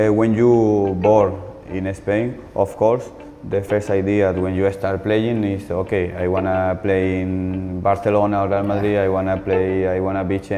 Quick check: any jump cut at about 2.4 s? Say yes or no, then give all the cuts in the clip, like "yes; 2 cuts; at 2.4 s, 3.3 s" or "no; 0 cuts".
no; 0 cuts